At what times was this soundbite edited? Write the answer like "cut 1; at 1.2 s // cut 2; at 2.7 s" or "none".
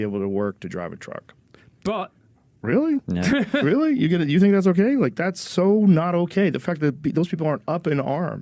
none